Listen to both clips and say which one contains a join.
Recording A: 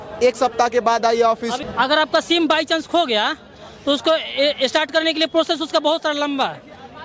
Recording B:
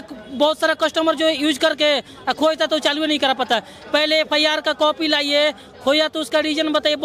A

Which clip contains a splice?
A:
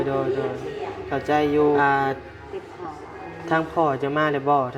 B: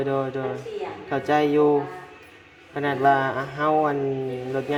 A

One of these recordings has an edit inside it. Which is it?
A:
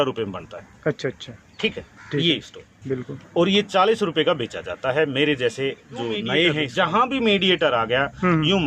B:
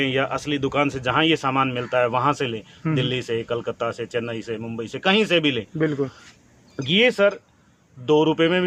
A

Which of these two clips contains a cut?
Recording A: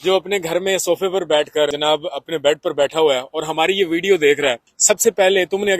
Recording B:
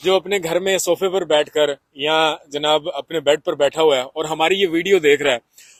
A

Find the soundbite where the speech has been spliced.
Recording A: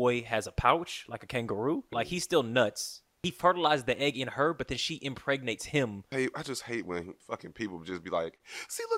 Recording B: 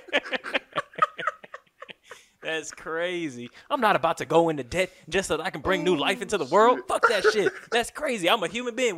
A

